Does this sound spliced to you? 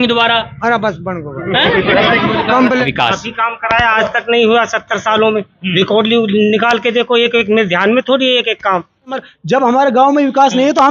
yes; 2 cuts; at 2.8 s, 9.3 s

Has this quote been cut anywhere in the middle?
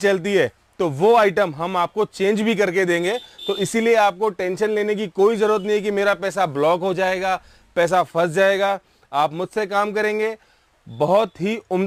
no; 0 cuts

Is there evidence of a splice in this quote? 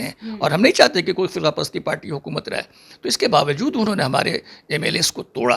no; 0 cuts

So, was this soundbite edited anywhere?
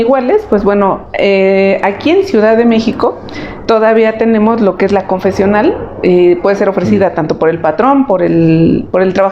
no; 0 cuts

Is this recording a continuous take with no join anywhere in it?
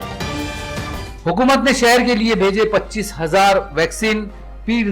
no; 1 cut; at 1.1 s

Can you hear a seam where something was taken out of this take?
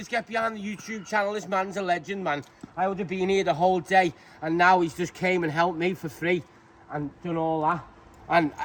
no; 0 cuts

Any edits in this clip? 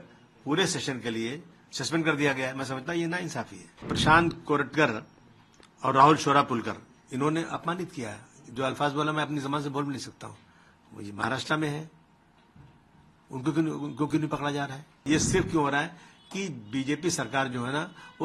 yes; 2 cuts; at 3.9 s, 15.0 s

